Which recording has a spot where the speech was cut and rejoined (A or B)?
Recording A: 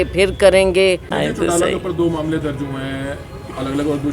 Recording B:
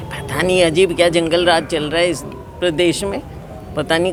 A